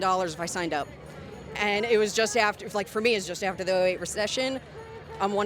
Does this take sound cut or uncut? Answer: uncut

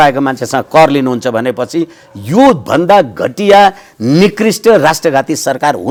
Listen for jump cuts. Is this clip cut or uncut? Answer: uncut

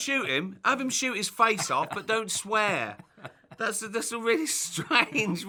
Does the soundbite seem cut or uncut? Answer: uncut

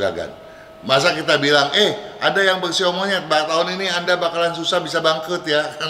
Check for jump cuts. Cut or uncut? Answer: uncut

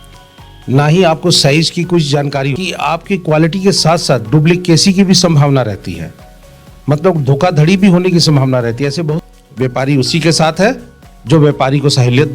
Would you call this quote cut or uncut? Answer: cut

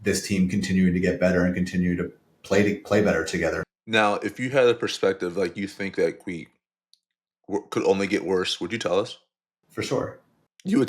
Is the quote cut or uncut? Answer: cut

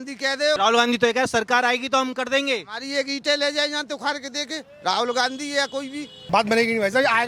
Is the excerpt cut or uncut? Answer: cut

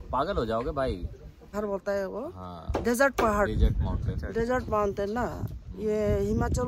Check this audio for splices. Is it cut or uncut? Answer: cut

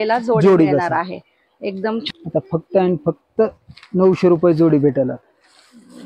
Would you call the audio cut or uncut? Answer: cut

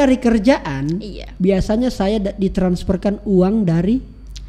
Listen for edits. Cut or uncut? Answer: uncut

